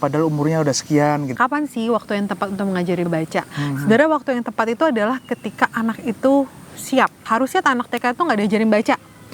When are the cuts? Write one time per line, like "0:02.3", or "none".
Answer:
0:01.3
0:03.1
0:07.2